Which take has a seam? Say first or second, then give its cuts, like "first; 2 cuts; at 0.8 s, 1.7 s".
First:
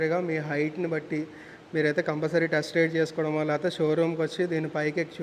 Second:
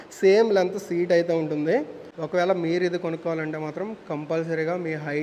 second; 1 cut; at 2.0 s